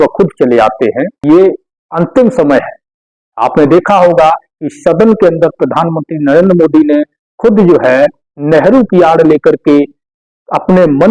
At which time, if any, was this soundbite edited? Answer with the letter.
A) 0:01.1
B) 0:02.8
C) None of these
A